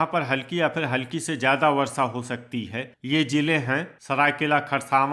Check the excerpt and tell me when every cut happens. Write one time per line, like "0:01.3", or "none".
0:03.9